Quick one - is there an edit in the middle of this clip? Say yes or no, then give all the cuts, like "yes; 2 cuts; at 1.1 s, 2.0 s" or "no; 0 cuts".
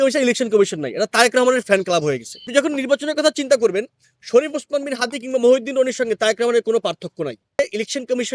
yes; 2 cuts; at 2.3 s, 7.6 s